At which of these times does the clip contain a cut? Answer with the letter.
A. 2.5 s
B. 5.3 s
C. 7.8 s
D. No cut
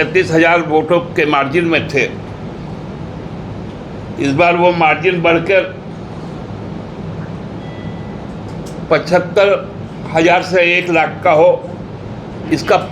D